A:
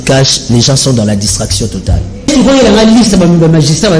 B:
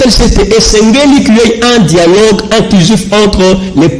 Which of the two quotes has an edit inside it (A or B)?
A